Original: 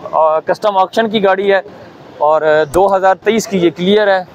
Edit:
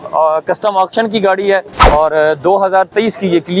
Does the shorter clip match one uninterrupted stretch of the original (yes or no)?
no